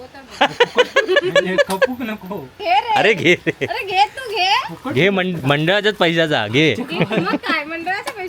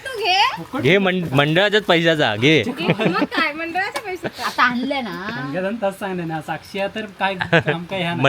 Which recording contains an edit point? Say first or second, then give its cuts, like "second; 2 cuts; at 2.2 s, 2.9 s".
first; 1 cut; at 2.6 s